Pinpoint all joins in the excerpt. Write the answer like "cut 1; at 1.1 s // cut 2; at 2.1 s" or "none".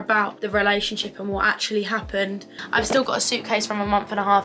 cut 1; at 2.6 s